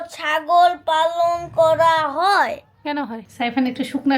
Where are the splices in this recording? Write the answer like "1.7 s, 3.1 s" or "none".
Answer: 3.2 s